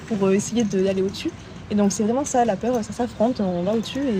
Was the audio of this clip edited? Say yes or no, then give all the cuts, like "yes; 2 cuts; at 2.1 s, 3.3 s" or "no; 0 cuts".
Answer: no; 0 cuts